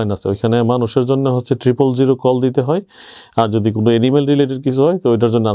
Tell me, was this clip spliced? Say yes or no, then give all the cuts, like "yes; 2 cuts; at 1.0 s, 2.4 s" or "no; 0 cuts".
no; 0 cuts